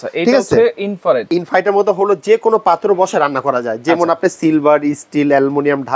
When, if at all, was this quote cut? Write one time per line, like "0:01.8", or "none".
0:01.3